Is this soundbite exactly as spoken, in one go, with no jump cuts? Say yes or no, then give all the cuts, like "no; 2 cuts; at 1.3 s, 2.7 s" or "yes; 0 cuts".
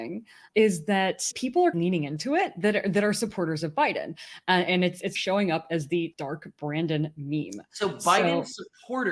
no; 2 cuts; at 1.3 s, 6.1 s